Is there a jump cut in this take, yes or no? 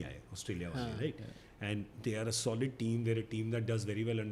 no